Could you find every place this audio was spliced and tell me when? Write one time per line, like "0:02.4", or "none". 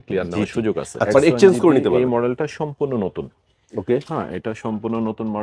0:01.9

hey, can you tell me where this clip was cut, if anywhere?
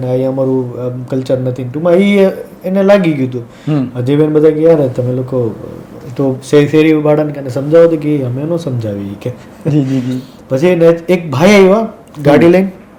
none

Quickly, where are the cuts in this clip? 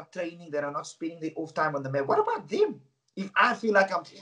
none

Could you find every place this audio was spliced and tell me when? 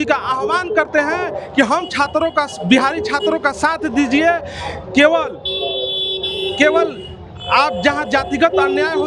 none

